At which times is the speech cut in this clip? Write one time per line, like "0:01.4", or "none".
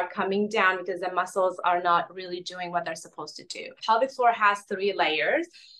0:03.7